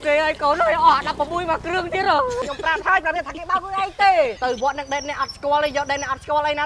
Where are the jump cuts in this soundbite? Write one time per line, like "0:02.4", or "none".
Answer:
0:02.4
0:04.4